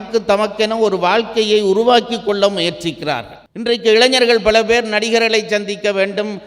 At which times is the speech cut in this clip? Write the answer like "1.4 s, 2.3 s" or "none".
3.4 s